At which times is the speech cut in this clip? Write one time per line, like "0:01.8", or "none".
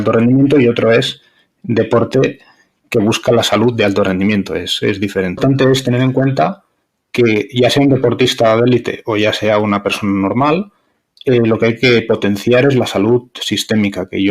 0:05.4